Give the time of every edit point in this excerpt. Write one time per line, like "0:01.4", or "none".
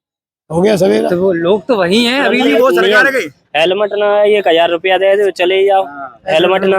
0:02.5